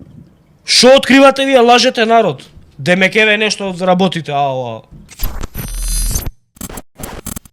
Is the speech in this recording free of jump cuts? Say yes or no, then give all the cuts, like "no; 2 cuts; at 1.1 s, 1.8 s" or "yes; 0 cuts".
no; 1 cut; at 5.0 s